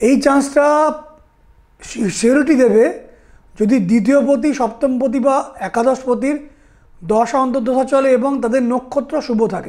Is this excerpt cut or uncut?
uncut